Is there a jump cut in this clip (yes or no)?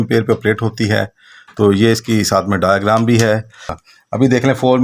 yes